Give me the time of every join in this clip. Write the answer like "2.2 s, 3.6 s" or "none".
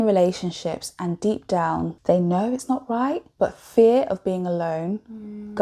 2.0 s, 3.3 s